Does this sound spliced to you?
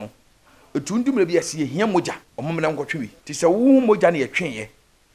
yes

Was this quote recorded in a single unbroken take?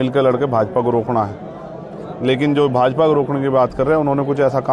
yes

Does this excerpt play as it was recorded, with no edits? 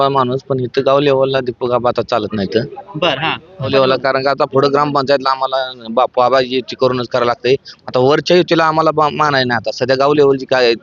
no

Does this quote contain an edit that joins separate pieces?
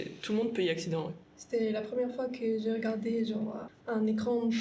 yes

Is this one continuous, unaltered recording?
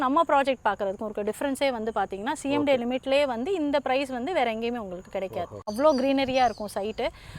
no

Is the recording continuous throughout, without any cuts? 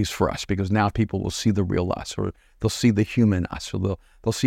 yes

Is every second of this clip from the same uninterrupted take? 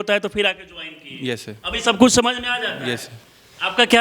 yes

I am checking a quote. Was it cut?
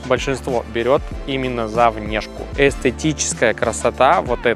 yes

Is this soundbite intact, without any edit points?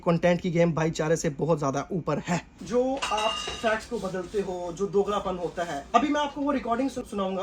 yes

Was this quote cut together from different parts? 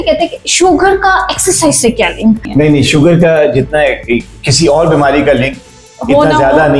yes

